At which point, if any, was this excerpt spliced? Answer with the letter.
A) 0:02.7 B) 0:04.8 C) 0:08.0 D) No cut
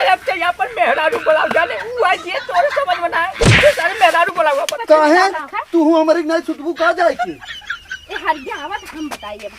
B